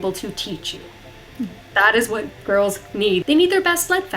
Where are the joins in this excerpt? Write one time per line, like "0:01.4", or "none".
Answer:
0:03.2